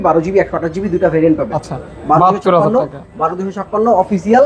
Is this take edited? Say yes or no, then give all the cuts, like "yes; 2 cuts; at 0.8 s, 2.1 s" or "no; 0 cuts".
yes; 1 cut; at 1.6 s